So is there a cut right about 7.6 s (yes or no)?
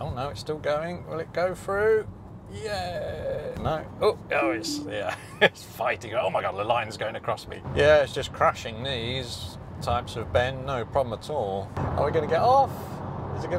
yes